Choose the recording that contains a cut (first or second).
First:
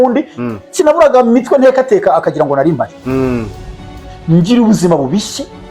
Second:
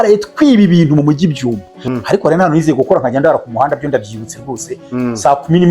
second